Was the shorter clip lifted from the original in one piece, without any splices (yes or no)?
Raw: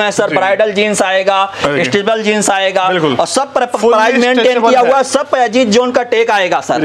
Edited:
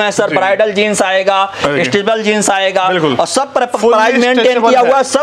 yes